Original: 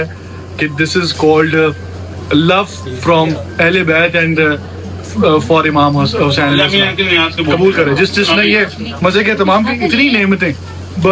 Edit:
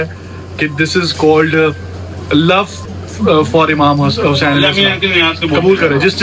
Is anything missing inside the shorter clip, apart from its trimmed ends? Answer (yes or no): yes